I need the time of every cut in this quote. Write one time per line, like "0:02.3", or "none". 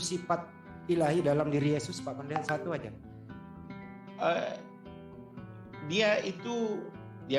none